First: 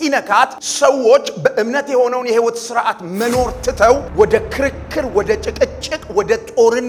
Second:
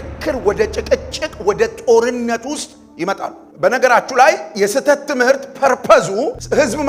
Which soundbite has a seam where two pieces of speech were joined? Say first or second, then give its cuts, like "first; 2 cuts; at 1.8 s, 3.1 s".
second; 1 cut; at 3.4 s